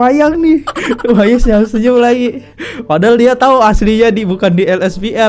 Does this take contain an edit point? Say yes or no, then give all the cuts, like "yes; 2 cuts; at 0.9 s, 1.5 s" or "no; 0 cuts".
no; 0 cuts